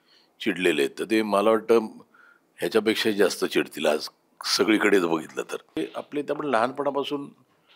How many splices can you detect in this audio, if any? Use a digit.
1